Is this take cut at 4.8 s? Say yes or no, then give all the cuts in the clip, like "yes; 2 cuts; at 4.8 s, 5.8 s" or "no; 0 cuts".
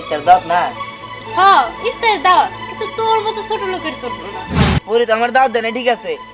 yes; 1 cut; at 4.8 s